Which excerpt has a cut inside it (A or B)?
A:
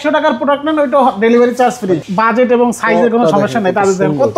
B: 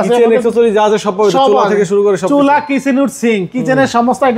A